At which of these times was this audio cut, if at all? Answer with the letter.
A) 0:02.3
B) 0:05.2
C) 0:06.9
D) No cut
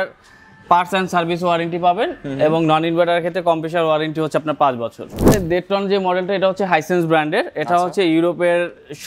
B